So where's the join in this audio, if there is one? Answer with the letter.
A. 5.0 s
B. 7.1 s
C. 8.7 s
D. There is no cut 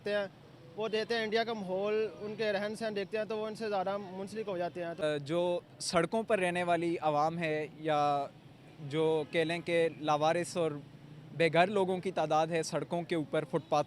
A